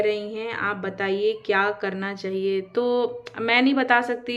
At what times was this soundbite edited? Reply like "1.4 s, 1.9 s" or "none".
none

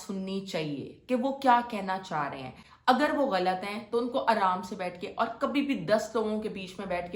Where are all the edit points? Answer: none

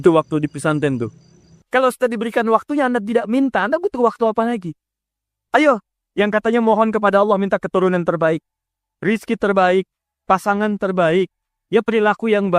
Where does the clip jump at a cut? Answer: 1.5 s

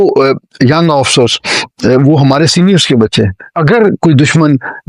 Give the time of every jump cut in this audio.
3.5 s

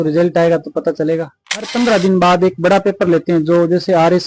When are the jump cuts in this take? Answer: 1.7 s

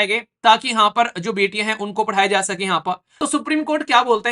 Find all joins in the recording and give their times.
3.1 s

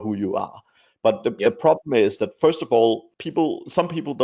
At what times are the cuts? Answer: 3.1 s

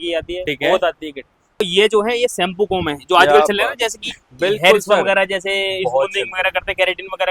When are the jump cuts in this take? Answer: 1.6 s

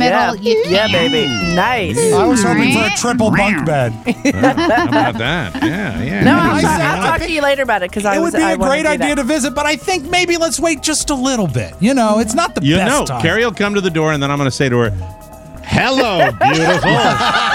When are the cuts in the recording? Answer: none

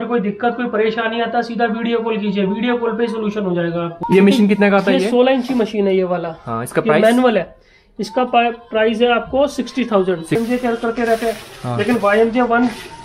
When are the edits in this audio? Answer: 4.0 s, 10.4 s

